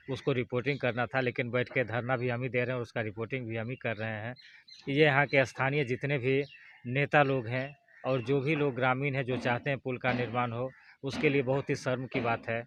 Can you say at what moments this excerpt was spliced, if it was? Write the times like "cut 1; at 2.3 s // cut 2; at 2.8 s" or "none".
none

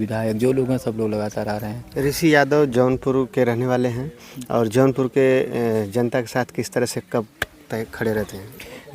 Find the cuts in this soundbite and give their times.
none

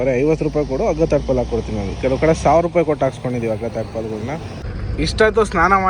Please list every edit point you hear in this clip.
cut 1; at 4.6 s

